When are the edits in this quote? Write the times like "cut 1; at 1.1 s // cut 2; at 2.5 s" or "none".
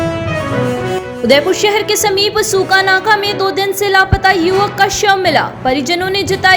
cut 1; at 0.9 s